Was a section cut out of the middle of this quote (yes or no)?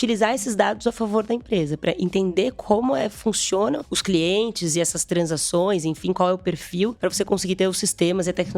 yes